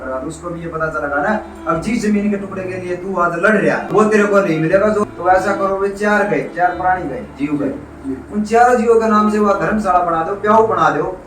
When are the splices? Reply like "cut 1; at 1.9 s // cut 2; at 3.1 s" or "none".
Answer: cut 1; at 3.9 s // cut 2; at 5.0 s